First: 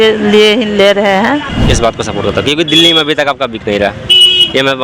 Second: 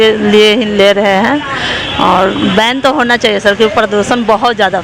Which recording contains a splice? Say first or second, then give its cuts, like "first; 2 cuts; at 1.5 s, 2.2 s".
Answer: first; 1 cut; at 1.5 s